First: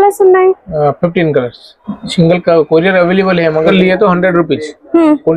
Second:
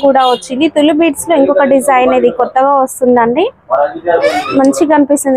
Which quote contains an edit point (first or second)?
first